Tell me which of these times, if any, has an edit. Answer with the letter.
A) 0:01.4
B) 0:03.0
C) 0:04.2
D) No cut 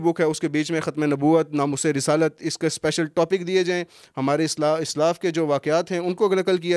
D